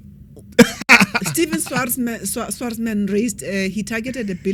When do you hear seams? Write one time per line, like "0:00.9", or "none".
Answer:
none